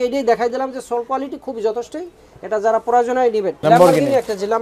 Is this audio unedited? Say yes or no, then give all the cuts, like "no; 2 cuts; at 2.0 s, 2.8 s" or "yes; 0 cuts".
no; 1 cut; at 3.5 s